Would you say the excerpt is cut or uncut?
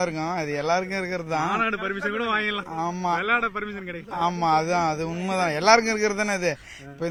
uncut